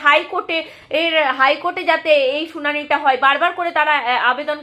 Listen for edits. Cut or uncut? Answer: uncut